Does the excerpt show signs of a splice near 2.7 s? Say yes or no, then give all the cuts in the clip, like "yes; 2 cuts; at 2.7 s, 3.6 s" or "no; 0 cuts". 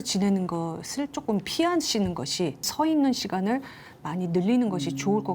yes; 1 cut; at 2.7 s